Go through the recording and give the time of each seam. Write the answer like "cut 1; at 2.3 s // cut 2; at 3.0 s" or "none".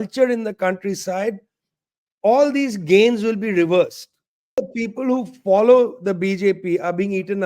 cut 1; at 4.6 s